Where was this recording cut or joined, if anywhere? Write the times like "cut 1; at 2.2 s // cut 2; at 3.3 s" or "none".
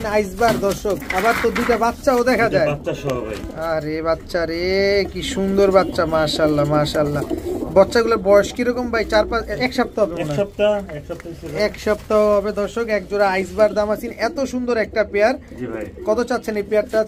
none